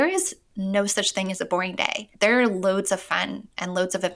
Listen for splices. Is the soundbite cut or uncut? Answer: cut